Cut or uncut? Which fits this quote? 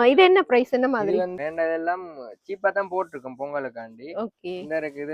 cut